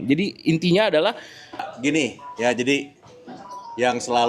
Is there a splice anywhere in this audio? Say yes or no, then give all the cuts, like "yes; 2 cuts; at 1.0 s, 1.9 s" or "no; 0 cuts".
yes; 1 cut; at 1.7 s